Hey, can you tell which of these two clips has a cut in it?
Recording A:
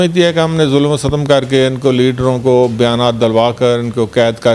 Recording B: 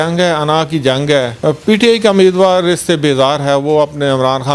B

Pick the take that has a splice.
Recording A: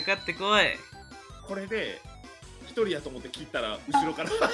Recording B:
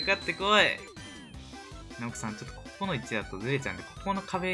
A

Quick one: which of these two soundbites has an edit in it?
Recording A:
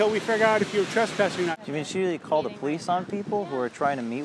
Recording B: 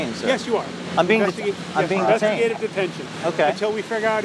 A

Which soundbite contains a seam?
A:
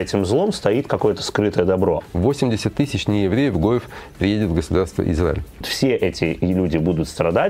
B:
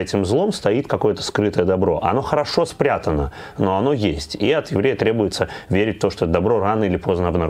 A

